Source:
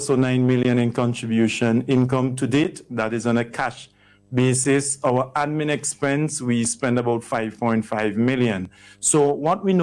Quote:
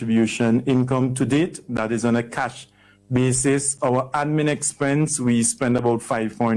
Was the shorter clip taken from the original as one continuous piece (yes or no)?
yes